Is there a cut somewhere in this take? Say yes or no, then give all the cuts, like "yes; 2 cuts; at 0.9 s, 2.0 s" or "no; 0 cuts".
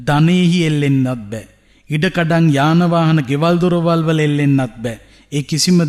no; 0 cuts